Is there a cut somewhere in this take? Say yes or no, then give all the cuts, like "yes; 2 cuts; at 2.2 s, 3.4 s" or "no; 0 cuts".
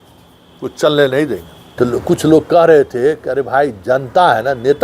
yes; 1 cut; at 1.6 s